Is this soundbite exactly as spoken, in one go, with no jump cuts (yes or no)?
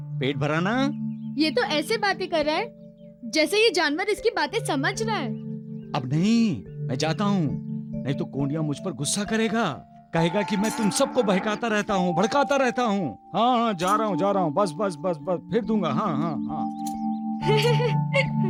yes